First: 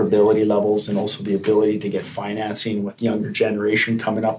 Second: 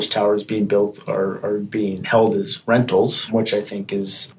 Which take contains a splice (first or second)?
second